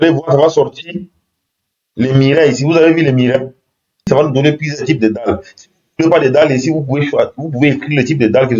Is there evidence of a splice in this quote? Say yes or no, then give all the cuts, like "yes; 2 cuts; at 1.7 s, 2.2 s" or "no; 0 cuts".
yes; 1 cut; at 4.0 s